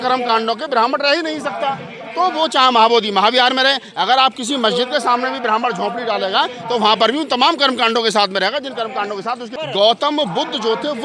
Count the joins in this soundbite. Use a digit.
0